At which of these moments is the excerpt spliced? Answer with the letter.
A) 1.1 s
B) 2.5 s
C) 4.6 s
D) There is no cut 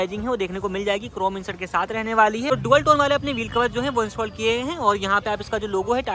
B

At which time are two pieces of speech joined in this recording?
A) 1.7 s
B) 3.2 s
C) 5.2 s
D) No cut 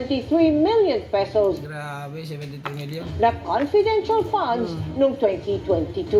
D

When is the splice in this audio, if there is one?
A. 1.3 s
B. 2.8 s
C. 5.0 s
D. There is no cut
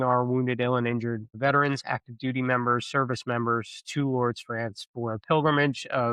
A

